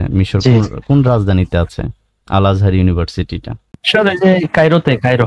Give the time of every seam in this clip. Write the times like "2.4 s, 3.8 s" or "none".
3.8 s